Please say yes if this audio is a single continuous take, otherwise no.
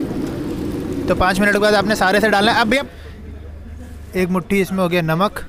no